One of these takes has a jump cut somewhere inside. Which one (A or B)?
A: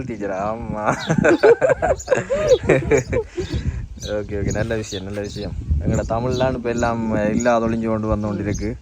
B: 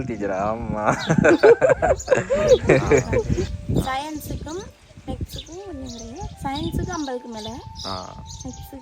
B